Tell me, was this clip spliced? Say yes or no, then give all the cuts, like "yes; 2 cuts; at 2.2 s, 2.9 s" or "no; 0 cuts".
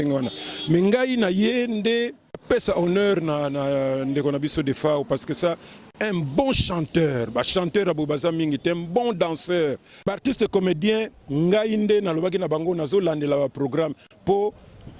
yes; 2 cuts; at 2.4 s, 10.0 s